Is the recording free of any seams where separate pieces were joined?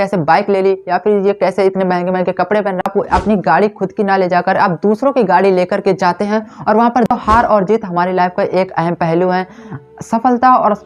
no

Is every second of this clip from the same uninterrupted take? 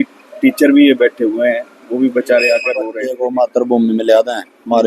no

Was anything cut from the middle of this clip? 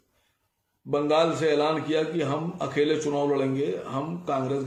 no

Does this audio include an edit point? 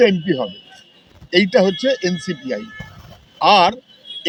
no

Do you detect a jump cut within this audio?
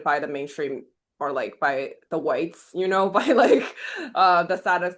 no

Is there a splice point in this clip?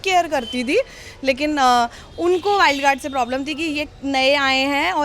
no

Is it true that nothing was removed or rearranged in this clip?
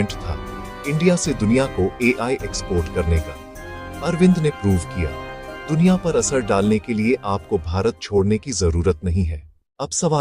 yes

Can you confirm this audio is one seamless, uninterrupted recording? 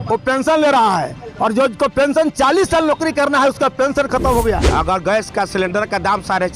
no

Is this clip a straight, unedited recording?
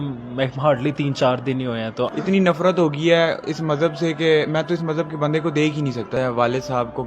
no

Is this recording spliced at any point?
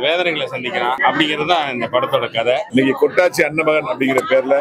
yes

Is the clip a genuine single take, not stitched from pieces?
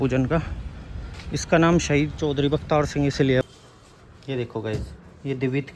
no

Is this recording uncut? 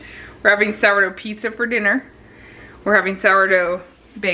yes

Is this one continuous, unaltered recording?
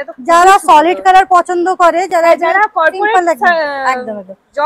yes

